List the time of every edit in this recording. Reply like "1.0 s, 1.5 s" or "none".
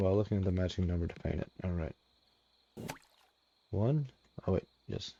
none